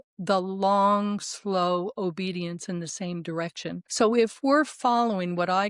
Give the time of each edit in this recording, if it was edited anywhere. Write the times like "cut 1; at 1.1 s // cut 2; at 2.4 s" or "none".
cut 1; at 3.8 s